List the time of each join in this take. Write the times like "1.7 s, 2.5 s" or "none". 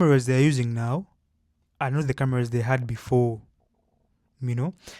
none